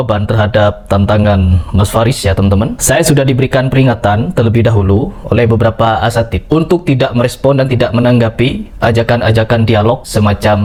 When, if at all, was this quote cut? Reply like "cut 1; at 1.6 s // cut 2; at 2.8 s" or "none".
none